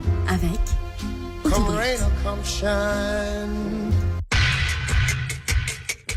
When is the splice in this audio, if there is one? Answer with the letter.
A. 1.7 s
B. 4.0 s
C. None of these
B